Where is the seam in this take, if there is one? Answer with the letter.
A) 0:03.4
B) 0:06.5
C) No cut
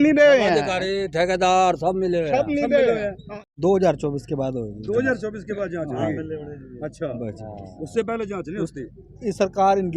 A